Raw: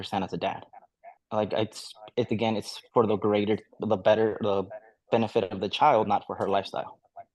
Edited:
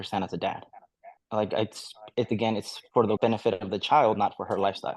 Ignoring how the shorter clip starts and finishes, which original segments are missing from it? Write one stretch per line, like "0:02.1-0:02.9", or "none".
0:03.2-0:05.1